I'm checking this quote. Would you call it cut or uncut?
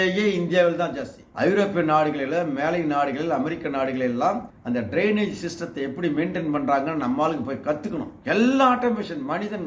cut